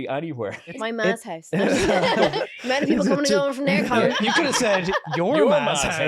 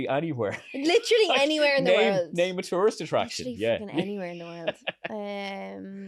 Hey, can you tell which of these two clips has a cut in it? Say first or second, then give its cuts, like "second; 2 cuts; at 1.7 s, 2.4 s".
first; 3 cuts; at 0.8 s, 2.3 s, 4.2 s